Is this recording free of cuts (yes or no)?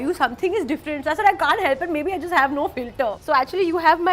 no